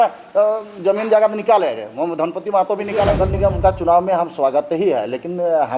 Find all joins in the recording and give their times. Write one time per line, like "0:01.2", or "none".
0:03.2